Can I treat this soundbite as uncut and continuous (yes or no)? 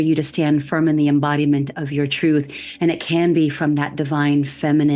yes